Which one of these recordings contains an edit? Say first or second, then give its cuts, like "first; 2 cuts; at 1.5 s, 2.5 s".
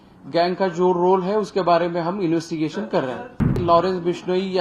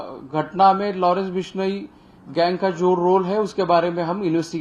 first; 1 cut; at 3.5 s